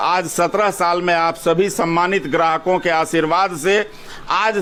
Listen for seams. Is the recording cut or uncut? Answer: uncut